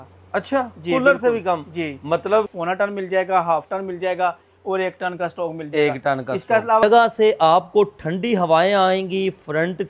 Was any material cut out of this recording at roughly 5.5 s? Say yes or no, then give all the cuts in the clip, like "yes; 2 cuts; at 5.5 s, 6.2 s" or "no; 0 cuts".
no; 2 cuts; at 2.5 s, 6.8 s